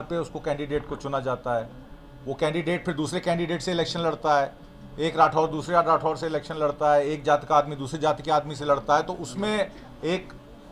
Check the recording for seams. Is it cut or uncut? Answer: uncut